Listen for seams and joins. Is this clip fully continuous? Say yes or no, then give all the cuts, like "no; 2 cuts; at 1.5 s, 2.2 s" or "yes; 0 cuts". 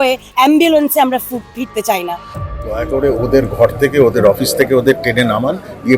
no; 1 cut; at 2.3 s